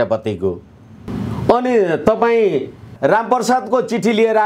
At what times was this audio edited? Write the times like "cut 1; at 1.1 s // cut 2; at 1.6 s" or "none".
cut 1; at 1.0 s // cut 2; at 2.9 s

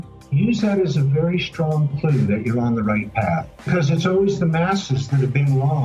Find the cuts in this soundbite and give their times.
cut 1; at 3.7 s

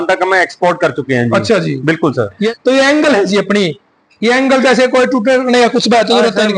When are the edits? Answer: none

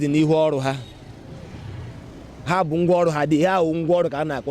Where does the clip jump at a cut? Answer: none

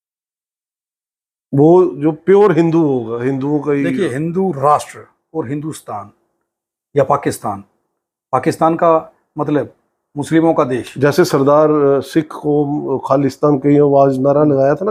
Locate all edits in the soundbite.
none

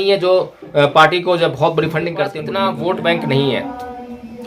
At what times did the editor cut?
cut 1; at 2.4 s

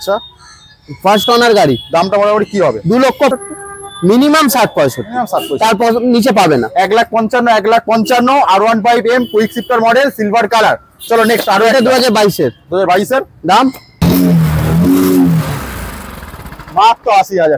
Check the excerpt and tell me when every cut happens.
cut 1; at 3.3 s // cut 2; at 14.0 s

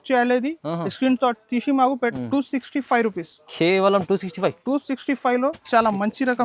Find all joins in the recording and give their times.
cut 1; at 2.1 s

